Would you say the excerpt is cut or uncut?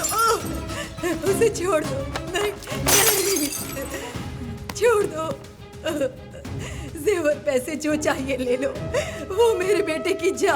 uncut